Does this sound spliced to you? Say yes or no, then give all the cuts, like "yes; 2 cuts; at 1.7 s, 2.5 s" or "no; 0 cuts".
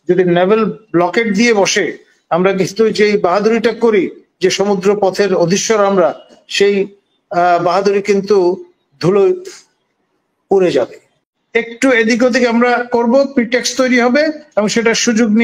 yes; 1 cut; at 11.2 s